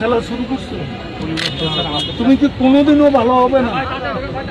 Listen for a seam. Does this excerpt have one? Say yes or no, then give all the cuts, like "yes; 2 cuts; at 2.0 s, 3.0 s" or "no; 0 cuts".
no; 0 cuts